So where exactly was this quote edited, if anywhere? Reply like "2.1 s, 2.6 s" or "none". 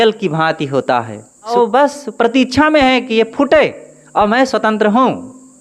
1.5 s